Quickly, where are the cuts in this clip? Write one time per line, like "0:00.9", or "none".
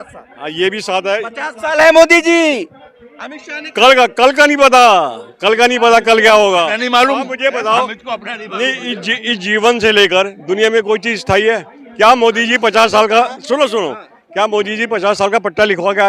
none